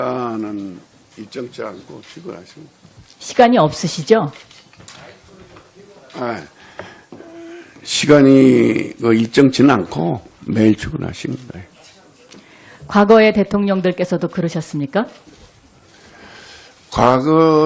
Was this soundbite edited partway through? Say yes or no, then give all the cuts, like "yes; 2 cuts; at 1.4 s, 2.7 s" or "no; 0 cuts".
no; 0 cuts